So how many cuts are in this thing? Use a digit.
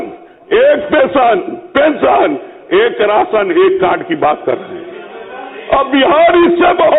0